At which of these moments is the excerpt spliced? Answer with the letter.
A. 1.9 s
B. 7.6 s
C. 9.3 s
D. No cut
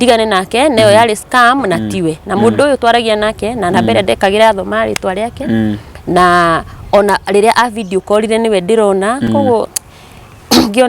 D